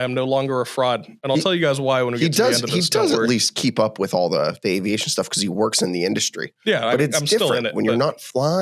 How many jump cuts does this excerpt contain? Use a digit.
1